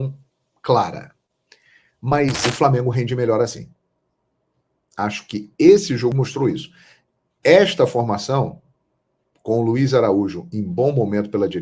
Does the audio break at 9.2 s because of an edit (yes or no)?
no